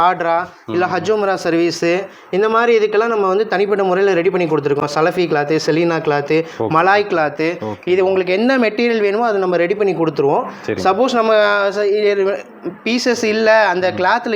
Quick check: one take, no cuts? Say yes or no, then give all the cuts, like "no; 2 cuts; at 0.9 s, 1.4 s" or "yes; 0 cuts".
yes; 0 cuts